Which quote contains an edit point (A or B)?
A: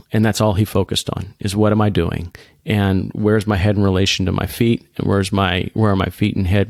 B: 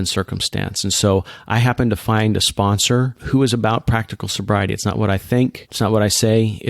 B